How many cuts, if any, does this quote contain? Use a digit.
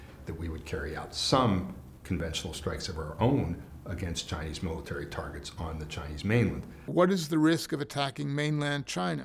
1